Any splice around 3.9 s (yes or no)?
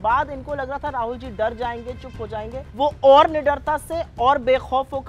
no